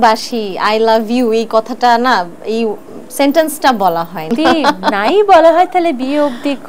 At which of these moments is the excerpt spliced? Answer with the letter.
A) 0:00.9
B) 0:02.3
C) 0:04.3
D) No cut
C